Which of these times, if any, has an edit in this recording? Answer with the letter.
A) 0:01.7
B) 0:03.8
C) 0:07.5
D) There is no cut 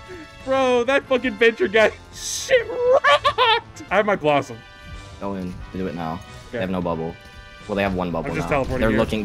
B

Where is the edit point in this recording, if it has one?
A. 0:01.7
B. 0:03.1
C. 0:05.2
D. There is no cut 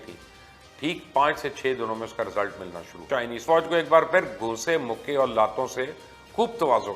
B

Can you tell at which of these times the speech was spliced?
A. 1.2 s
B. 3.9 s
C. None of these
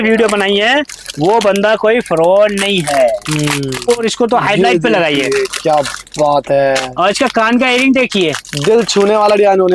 B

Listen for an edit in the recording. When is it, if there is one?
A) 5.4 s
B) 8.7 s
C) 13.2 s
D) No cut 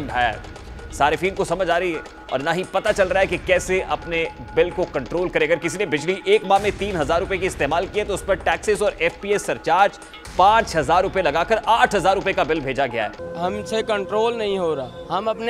C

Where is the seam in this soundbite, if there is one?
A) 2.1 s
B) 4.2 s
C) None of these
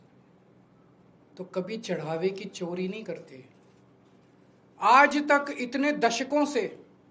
B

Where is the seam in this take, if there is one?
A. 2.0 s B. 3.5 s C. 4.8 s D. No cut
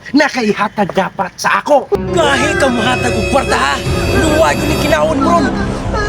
A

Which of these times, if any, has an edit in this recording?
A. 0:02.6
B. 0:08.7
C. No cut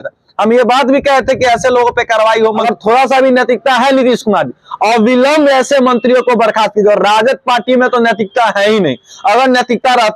A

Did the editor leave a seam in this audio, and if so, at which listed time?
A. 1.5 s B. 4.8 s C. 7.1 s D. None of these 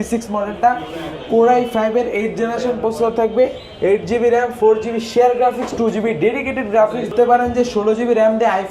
C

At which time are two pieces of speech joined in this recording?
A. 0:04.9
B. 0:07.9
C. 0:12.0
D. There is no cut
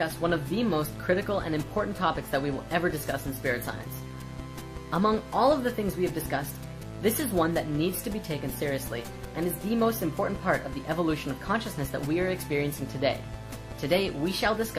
D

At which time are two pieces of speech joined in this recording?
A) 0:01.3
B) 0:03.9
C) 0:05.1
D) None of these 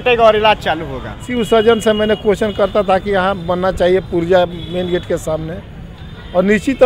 A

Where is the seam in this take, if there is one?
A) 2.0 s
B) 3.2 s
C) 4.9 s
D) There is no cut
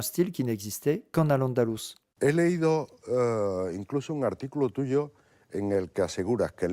A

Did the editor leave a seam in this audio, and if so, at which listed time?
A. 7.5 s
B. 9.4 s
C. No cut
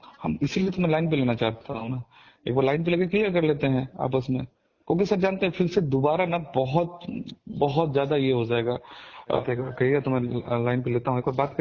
B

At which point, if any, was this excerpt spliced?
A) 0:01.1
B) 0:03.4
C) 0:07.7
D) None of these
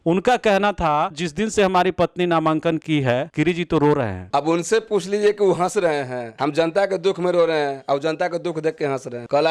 D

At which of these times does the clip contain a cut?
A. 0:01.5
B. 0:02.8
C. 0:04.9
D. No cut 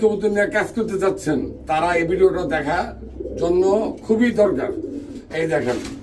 D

